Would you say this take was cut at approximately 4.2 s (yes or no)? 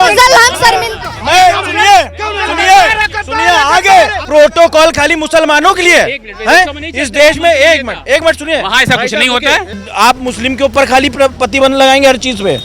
yes